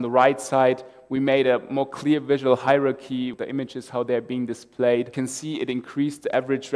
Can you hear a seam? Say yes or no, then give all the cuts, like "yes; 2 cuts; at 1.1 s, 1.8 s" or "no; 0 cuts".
yes; 2 cuts; at 3.4 s, 5.1 s